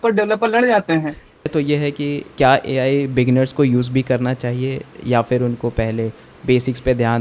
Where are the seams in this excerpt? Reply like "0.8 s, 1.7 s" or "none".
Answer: 1.5 s